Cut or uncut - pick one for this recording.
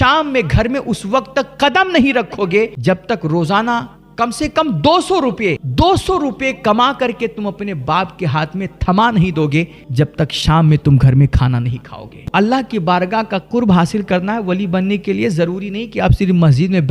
cut